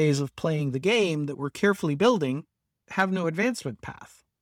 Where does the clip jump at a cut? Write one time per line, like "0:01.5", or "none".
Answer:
none